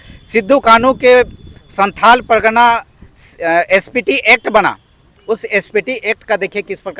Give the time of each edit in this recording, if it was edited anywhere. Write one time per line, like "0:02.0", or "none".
none